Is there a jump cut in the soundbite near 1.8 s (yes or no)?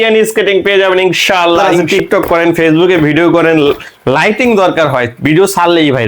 yes